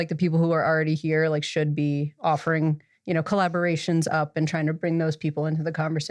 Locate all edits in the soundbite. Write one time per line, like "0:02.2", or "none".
none